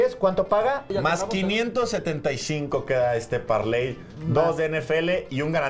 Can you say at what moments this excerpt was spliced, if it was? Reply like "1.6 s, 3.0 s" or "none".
none